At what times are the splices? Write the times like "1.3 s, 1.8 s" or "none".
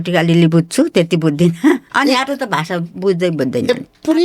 1.9 s

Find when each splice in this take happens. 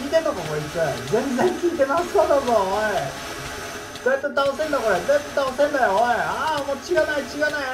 none

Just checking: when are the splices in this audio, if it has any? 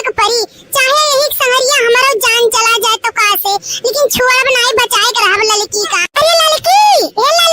4.2 s

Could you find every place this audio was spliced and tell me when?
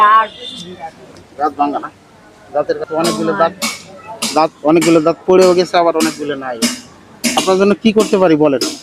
2.8 s, 7.4 s

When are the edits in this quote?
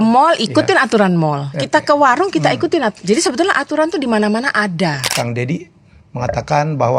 5.1 s

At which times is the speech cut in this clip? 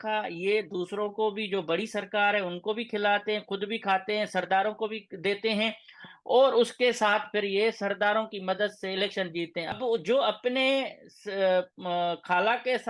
9.7 s

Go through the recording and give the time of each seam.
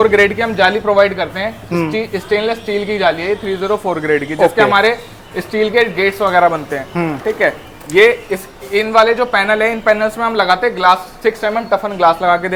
none

